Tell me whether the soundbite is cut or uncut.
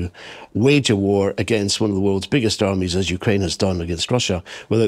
uncut